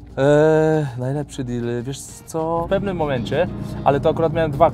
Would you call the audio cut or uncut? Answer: cut